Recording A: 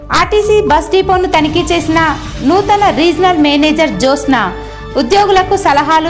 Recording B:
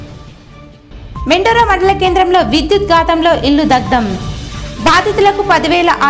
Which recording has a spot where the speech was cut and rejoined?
B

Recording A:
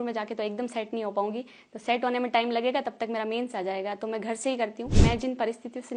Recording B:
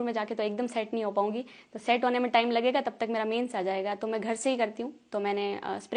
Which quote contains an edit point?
A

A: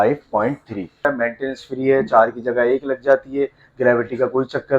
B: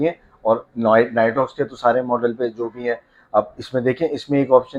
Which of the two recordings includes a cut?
A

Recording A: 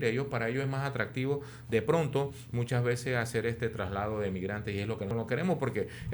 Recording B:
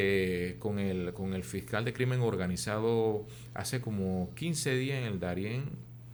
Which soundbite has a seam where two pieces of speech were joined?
A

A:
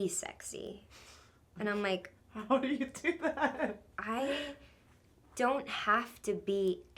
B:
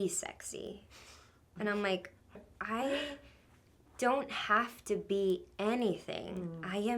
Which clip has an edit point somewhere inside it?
B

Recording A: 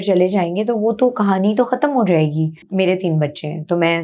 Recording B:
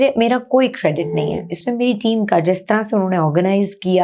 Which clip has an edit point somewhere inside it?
A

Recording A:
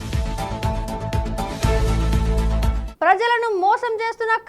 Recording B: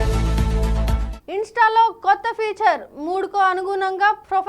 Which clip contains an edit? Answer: B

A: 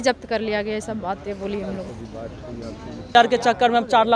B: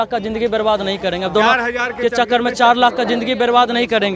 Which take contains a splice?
A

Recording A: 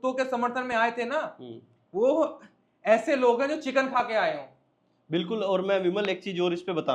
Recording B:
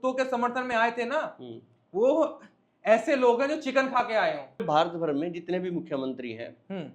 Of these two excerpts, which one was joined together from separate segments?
B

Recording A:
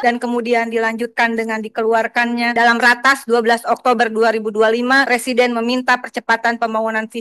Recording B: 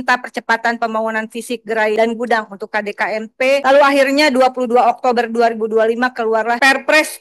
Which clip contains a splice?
B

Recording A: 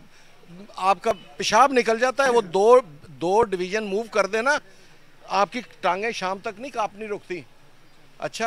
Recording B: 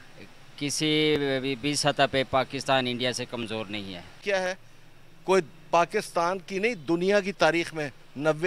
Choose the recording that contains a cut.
B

